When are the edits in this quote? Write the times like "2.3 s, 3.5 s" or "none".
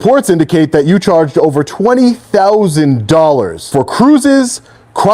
3.6 s